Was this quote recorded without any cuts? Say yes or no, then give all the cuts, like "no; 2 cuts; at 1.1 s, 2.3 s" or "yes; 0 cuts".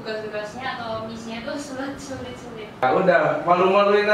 no; 1 cut; at 2.8 s